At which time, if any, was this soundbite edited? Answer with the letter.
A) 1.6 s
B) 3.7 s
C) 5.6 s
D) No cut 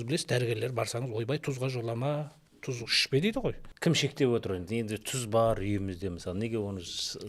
B